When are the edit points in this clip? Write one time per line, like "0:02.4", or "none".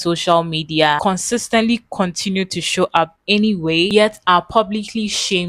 0:03.9